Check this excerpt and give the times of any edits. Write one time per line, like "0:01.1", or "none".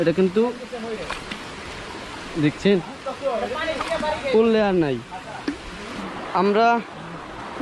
0:05.9